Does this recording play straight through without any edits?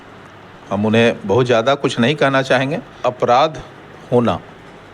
no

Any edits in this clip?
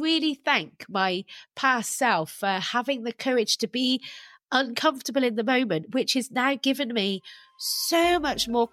no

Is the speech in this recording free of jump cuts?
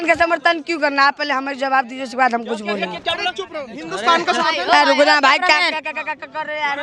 yes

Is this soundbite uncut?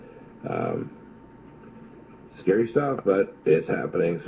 yes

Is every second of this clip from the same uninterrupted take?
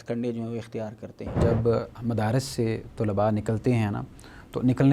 no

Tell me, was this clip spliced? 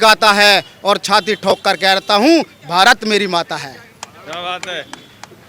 no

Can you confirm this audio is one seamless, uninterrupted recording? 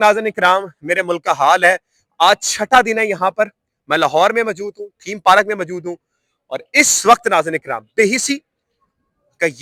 yes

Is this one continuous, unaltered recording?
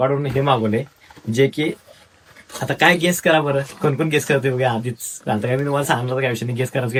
yes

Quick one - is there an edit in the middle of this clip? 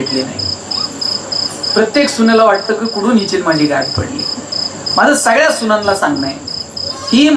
no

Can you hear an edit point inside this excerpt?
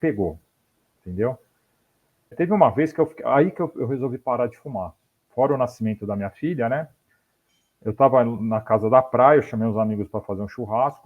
yes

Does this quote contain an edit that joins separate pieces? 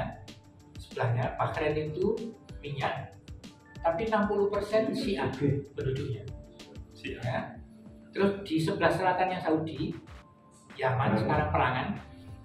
no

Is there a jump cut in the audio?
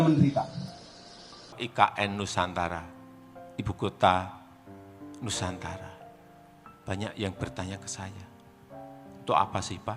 yes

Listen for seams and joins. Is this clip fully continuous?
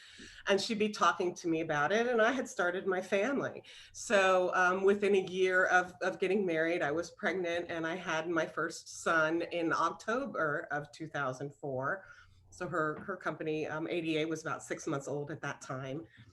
yes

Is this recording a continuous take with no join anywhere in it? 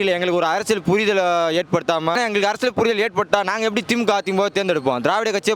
no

